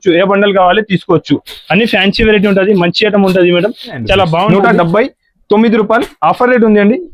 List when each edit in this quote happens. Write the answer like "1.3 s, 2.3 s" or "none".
4.5 s